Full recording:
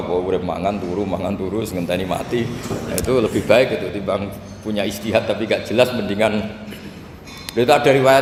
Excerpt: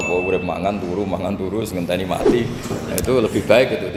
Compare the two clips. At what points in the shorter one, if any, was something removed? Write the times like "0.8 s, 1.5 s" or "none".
none